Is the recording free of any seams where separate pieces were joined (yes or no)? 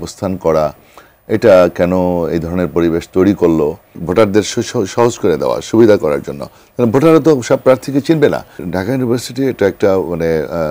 no